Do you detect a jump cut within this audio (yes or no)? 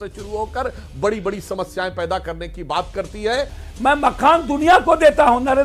yes